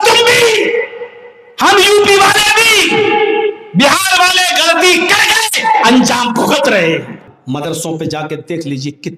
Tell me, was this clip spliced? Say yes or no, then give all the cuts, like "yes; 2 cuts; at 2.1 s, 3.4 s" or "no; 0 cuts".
yes; 1 cut; at 7.3 s